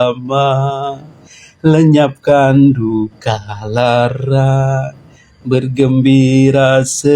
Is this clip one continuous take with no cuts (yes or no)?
yes